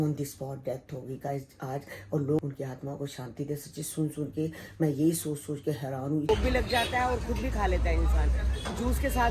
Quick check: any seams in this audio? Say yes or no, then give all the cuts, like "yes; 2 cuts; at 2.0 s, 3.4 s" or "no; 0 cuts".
yes; 2 cuts; at 2.4 s, 6.3 s